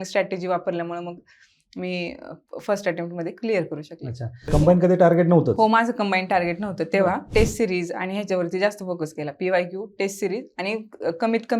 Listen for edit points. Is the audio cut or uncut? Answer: cut